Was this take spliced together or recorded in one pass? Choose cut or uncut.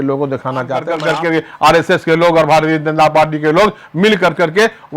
cut